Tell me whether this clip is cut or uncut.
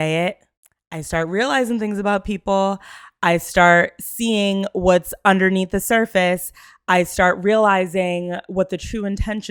uncut